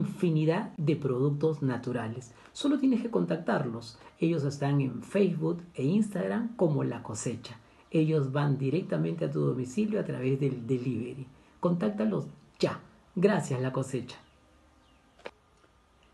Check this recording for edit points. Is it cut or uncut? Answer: uncut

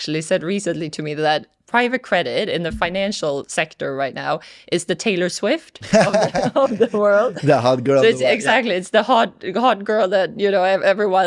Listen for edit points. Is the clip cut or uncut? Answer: uncut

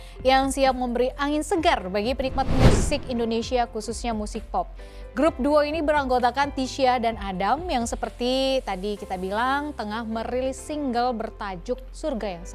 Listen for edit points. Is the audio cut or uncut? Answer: uncut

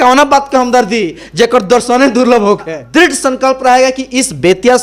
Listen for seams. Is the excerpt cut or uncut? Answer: cut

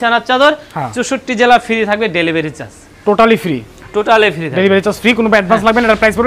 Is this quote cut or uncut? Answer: uncut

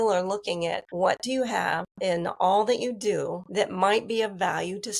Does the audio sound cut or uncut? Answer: cut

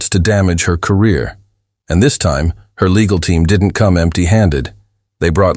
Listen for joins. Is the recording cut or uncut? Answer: uncut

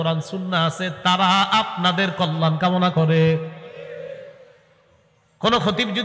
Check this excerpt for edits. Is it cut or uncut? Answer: uncut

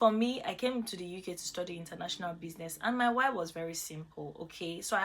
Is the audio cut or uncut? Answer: uncut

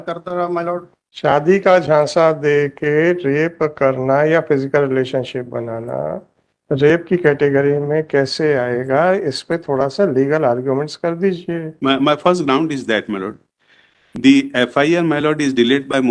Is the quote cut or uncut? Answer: cut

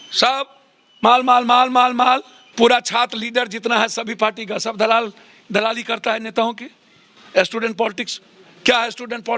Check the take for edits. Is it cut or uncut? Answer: cut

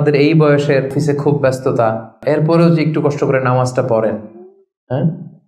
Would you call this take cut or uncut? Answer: cut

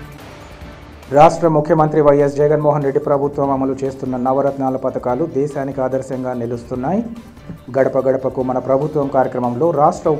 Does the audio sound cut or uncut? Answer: cut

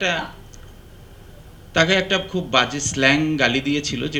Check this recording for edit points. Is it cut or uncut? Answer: uncut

